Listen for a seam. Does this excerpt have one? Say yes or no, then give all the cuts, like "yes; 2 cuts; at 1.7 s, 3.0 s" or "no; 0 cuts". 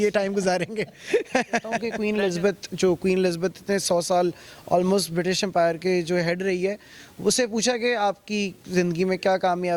yes; 1 cut; at 1.9 s